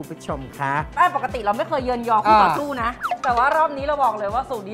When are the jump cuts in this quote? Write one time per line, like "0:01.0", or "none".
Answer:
0:00.9
0:03.1